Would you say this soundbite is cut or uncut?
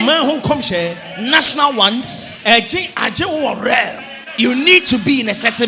uncut